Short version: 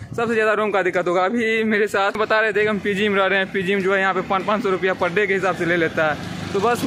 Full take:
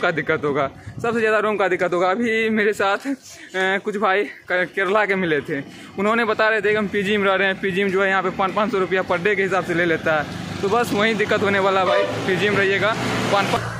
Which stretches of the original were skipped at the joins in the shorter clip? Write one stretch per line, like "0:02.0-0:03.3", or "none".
0:03.0-0:06.2